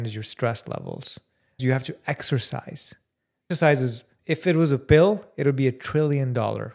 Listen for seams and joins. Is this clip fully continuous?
no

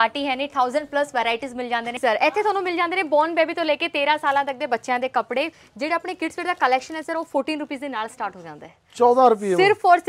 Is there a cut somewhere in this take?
yes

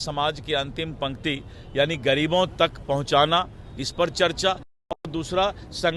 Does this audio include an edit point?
no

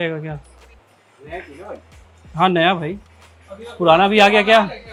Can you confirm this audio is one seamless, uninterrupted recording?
yes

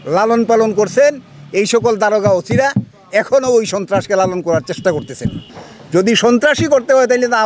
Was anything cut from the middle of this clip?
yes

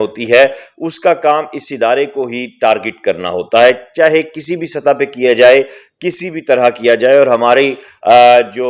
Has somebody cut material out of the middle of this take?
no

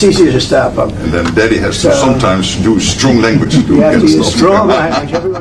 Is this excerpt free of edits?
yes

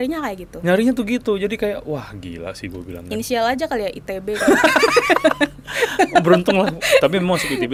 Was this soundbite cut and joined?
no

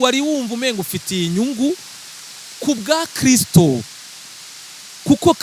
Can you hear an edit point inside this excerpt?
no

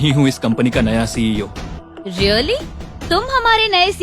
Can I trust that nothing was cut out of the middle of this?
no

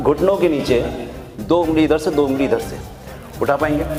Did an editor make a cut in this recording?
no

